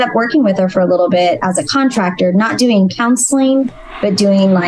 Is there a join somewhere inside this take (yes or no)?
no